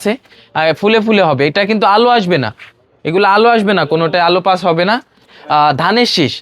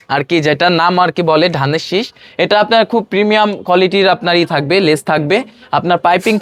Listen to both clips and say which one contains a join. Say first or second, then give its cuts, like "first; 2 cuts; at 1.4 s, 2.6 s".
first; 1 cut; at 5.3 s